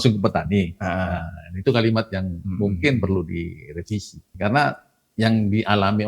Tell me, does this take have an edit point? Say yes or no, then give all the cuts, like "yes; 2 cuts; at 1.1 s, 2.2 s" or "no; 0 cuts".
yes; 1 cut; at 4.3 s